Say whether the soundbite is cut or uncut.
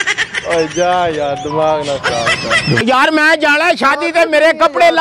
cut